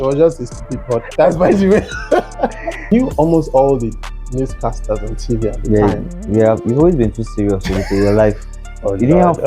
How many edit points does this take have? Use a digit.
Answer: 1